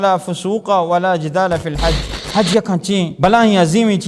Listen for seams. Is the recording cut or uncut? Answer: cut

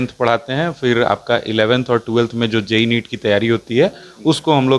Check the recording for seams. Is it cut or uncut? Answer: uncut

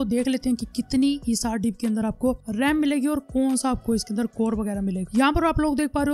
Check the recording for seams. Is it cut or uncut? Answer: cut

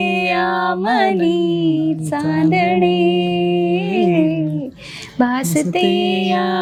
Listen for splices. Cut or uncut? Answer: uncut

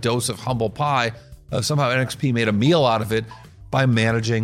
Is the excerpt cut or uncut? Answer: uncut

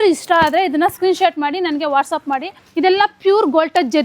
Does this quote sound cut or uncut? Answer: cut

